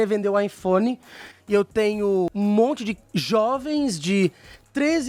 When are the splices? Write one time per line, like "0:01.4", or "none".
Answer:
none